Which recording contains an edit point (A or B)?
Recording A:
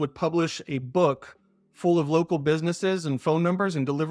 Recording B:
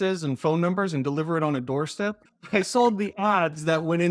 B